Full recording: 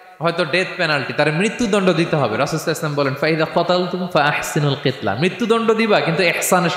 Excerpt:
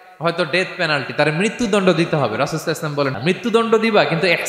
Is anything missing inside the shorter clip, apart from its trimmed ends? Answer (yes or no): yes